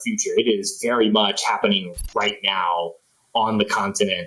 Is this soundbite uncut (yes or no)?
yes